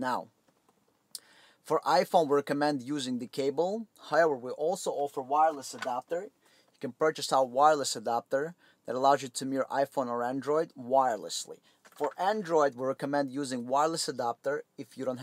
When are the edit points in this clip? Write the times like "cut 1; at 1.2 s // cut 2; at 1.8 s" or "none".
none